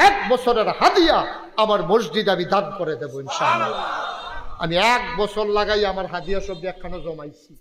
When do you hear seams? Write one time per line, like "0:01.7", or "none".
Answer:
none